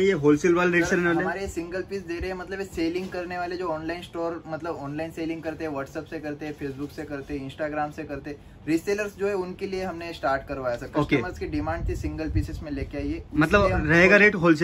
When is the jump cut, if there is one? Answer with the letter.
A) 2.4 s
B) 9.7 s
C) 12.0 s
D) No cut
D